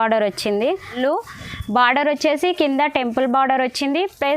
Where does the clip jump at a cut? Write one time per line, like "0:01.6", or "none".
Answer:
0:01.0